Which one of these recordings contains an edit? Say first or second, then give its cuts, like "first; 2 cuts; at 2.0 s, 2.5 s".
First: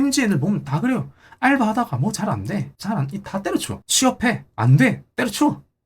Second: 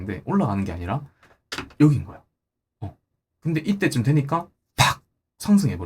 first; 2 cuts; at 2.7 s, 3.8 s